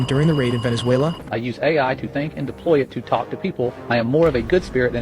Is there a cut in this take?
yes; 1 cut; at 1.2 s

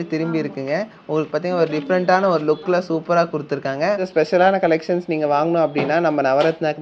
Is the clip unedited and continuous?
no; 1 cut; at 4.0 s

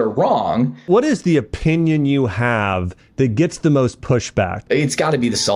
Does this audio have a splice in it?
yes; 2 cuts; at 0.9 s, 4.6 s

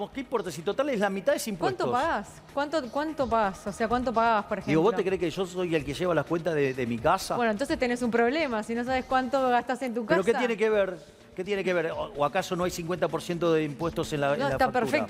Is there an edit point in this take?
no; 0 cuts

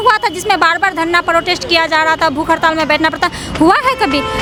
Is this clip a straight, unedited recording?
yes; 0 cuts

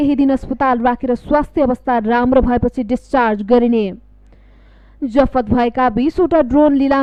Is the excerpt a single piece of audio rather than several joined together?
yes; 0 cuts

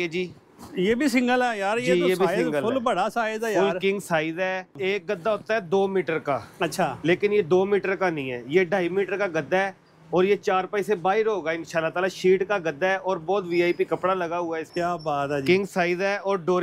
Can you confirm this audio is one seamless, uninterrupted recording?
no; 2 cuts; at 4.8 s, 14.6 s

